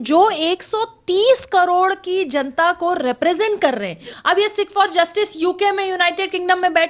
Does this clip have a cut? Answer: yes; 1 cut; at 4.1 s

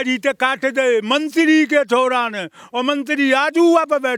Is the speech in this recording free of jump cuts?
yes; 0 cuts

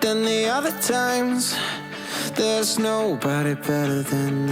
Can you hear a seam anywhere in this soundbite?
no; 0 cuts

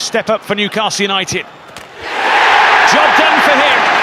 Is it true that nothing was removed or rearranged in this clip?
yes; 0 cuts

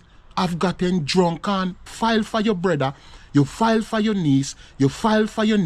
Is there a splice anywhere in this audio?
yes; 1 cut; at 1.8 s

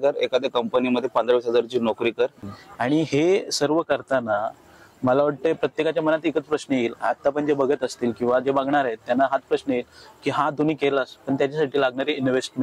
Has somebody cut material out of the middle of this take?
yes; 1 cut; at 2.5 s

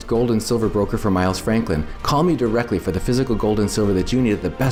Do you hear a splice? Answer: no; 0 cuts

